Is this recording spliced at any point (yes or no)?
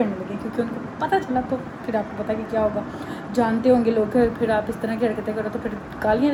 no